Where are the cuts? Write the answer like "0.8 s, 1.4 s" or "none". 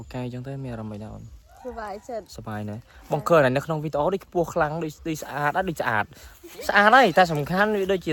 none

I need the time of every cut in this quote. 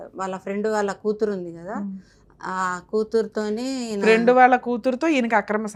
none

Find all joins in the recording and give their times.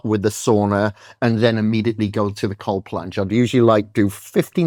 none

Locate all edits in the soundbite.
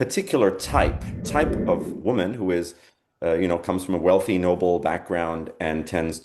1.1 s

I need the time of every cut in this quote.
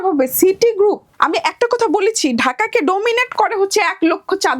1.1 s

